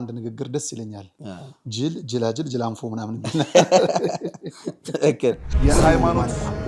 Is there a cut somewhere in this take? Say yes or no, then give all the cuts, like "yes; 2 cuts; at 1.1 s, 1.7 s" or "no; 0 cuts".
yes; 1 cut; at 5.5 s